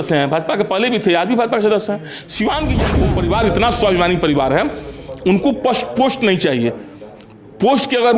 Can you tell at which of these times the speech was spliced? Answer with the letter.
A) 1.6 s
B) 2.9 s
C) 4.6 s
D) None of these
B